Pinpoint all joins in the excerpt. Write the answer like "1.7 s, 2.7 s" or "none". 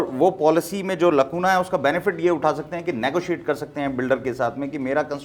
none